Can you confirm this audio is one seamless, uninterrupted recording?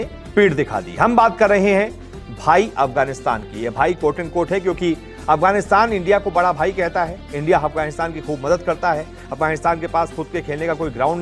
yes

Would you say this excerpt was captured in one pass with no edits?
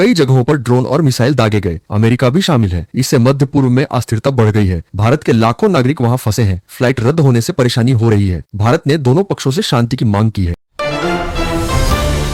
yes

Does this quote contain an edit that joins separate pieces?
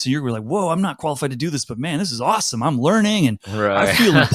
no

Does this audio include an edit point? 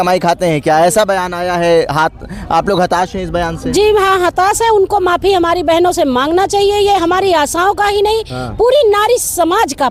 no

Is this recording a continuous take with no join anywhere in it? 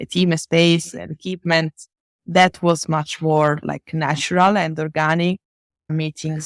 yes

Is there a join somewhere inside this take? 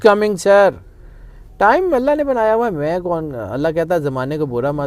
no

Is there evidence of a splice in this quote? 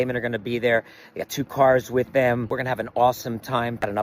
yes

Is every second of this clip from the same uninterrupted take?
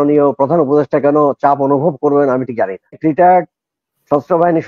no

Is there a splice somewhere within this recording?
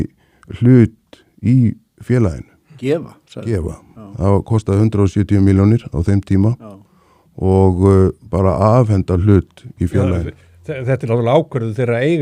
no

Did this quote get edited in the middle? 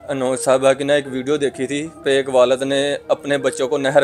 yes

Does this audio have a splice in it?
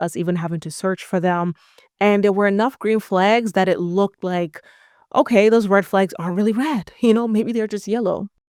no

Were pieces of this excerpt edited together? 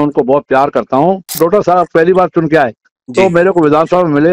yes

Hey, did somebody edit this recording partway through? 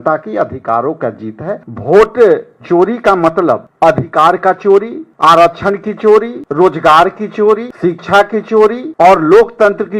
yes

